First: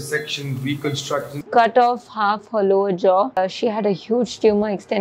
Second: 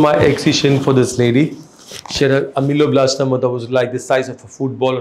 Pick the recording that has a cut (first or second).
first